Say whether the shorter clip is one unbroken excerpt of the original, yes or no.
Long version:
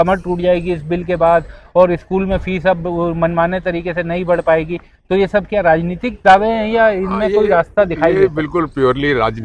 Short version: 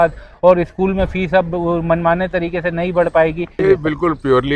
no